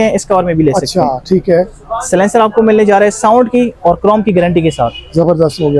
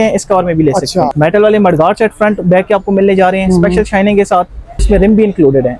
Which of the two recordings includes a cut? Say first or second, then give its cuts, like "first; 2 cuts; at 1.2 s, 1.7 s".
second; 2 cuts; at 1.1 s, 4.8 s